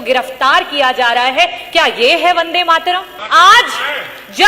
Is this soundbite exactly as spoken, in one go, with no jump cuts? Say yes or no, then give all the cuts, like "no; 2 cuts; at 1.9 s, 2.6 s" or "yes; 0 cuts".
no; 1 cut; at 3.2 s